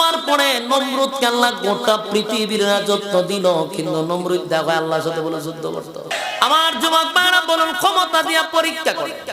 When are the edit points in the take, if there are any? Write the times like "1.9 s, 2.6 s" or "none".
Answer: 6.1 s